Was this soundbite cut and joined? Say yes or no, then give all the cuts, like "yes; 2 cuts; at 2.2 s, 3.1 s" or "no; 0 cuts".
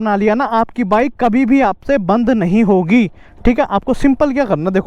no; 0 cuts